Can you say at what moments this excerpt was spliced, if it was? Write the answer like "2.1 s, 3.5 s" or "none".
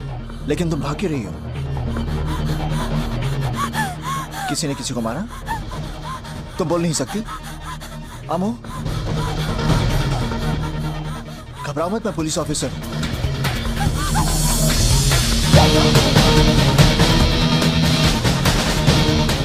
none